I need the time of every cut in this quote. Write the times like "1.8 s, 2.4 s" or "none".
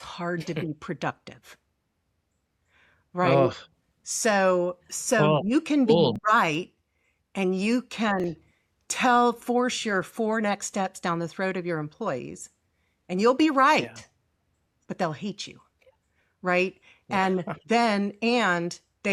none